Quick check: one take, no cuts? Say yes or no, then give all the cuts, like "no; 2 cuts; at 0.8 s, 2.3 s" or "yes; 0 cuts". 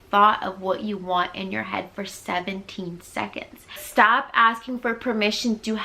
no; 1 cut; at 3.8 s